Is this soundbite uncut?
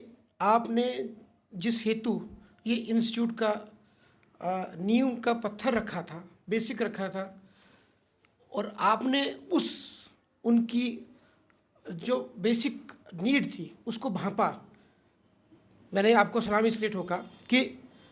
yes; 0 cuts

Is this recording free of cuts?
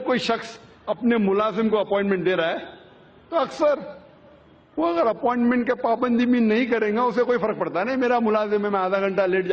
no; 1 cut; at 1.3 s

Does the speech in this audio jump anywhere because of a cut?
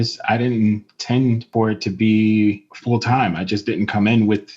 yes; 2 cuts; at 1.5 s, 2.7 s

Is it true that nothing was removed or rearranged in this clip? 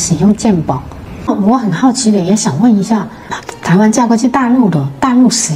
no; 1 cut; at 1.3 s

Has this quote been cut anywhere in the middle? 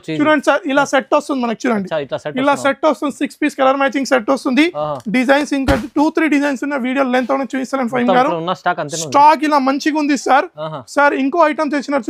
no; 0 cuts

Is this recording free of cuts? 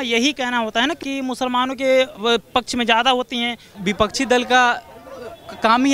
no; 2 cuts; at 1.0 s, 3.8 s

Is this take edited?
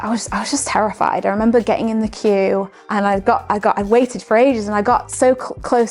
yes; 1 cut; at 2.8 s

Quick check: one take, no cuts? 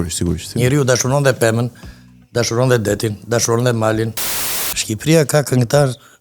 no; 1 cut; at 4.3 s

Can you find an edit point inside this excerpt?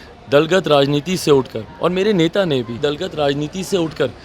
yes; 1 cut; at 2.7 s

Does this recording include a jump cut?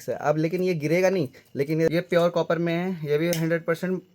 yes; 1 cut; at 1.9 s

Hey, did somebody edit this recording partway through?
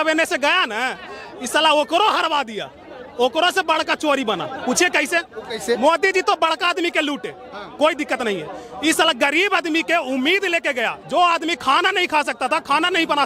no; 0 cuts

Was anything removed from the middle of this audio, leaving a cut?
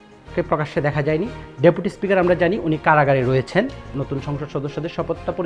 yes; 1 cut; at 3.9 s

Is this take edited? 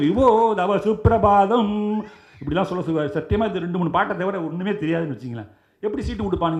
no; 0 cuts

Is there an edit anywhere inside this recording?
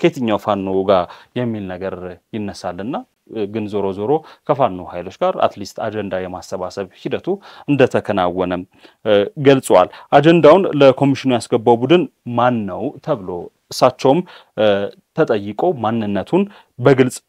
no; 0 cuts

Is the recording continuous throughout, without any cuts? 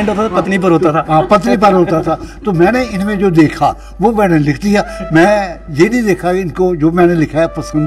yes; 0 cuts

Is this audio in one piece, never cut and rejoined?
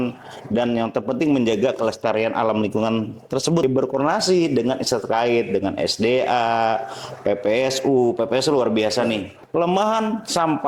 no; 2 cuts; at 3.6 s, 9.3 s

